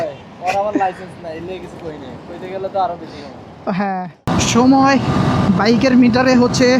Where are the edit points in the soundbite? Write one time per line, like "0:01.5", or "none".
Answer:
0:04.2